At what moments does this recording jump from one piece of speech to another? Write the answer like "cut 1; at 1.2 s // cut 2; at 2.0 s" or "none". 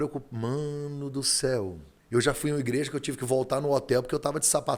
cut 1; at 1.9 s